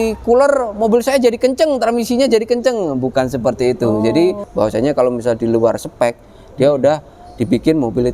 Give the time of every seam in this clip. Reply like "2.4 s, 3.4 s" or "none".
4.4 s